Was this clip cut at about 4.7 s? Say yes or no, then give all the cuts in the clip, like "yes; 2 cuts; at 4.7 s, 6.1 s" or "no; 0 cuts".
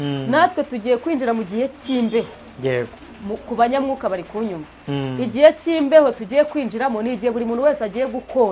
no; 0 cuts